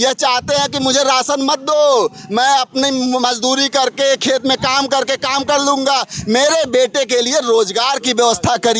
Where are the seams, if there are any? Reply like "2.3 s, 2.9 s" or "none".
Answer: none